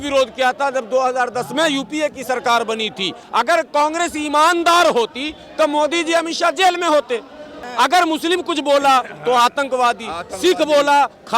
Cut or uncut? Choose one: cut